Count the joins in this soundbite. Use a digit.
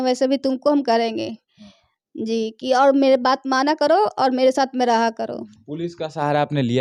0